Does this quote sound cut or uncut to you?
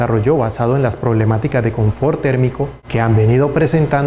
cut